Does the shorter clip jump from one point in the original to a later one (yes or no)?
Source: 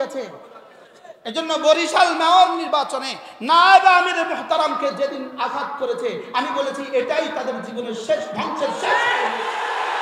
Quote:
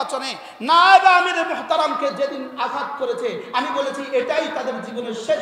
no